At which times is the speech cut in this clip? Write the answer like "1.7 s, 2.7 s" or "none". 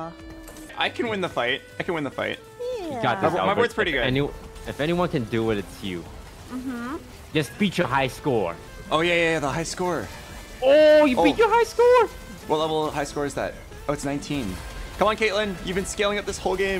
0.7 s, 2.5 s, 7.2 s, 8.7 s